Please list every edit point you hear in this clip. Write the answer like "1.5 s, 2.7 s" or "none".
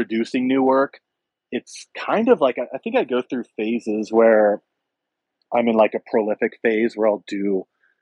none